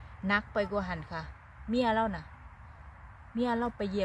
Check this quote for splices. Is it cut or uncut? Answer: uncut